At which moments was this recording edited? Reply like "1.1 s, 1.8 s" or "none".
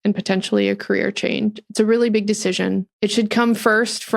2.9 s